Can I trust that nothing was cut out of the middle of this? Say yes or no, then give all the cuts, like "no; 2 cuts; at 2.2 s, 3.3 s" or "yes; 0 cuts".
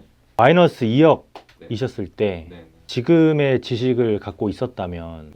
yes; 0 cuts